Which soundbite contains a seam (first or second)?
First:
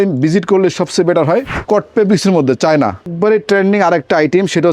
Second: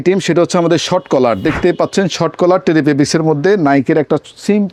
first